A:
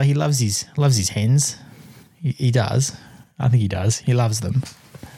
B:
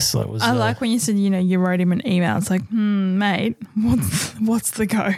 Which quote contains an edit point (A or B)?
A